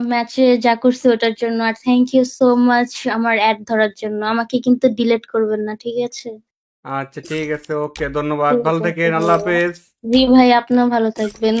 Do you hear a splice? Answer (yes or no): no